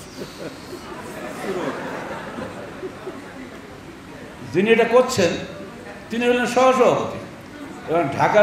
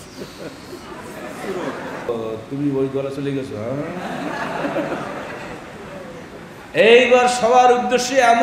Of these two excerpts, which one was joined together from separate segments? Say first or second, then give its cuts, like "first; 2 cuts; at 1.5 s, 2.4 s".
second; 1 cut; at 2.1 s